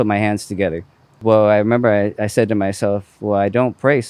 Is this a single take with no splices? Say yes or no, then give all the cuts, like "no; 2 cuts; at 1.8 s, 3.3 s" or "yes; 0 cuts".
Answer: no; 1 cut; at 1.2 s